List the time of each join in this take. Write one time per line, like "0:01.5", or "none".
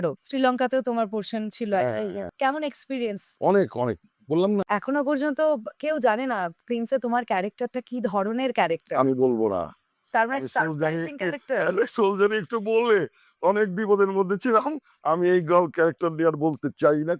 0:02.3
0:04.6